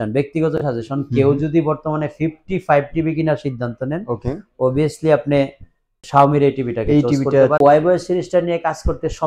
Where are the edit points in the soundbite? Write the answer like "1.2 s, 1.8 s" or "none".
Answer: 6.0 s, 7.6 s